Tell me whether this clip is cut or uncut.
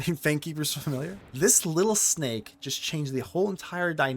cut